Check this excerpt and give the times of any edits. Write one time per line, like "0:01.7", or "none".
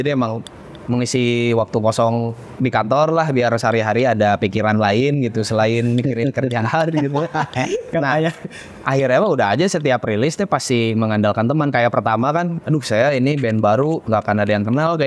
none